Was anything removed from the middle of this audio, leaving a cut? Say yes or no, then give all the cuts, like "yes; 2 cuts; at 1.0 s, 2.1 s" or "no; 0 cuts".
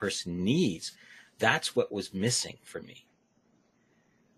no; 0 cuts